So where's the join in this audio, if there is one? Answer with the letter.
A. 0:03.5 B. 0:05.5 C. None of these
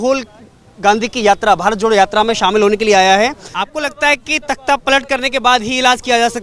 A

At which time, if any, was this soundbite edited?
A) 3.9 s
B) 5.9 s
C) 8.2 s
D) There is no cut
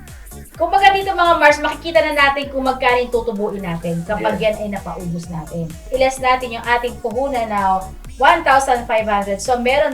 B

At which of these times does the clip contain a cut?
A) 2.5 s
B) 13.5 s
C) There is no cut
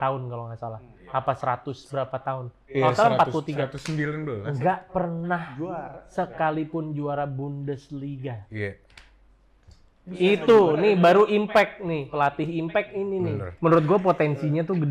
B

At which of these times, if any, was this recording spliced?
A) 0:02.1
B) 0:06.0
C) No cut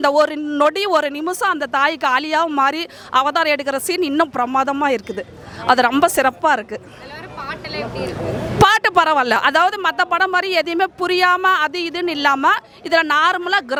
C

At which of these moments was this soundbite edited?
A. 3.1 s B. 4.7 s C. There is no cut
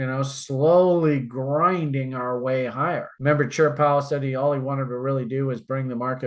A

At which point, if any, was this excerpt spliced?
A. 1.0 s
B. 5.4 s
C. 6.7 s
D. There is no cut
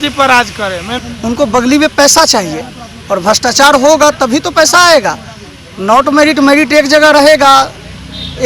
A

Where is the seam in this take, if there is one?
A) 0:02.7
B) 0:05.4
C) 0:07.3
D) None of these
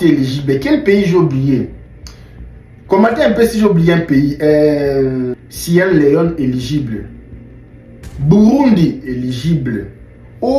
B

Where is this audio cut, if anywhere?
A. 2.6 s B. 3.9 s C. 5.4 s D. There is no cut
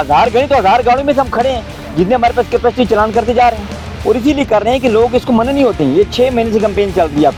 D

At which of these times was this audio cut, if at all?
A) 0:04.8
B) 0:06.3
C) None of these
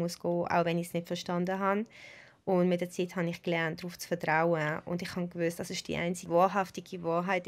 B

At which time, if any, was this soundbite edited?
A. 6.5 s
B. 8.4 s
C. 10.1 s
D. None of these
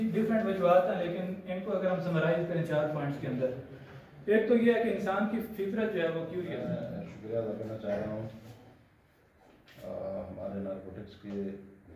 A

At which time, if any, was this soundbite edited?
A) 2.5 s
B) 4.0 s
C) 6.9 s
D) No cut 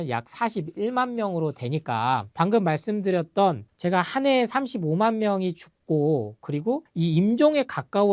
C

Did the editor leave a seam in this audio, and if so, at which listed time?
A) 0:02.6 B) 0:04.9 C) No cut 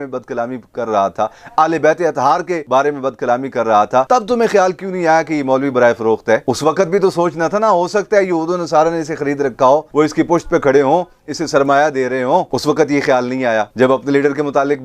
A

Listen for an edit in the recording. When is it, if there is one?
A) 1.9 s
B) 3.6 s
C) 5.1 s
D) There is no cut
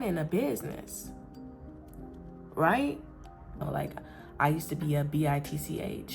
B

